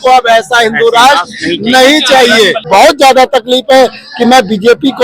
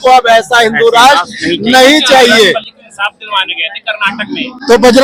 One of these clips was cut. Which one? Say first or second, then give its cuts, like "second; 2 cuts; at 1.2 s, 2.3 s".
first; 1 cut; at 2.6 s